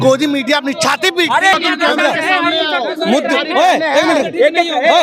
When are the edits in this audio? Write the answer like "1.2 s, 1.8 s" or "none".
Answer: 1.5 s

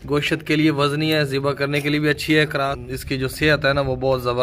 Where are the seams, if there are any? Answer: 2.8 s

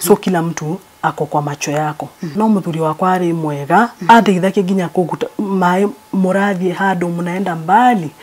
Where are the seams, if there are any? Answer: 2.3 s

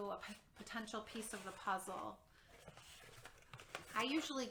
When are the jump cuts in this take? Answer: none

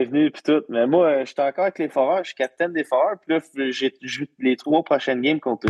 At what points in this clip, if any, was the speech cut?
4.6 s

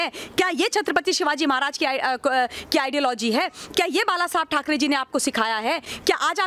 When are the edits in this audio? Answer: none

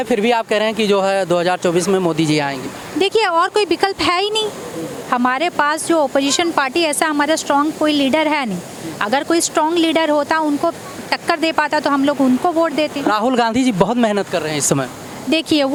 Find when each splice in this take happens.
none

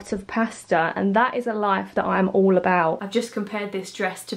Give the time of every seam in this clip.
3.0 s

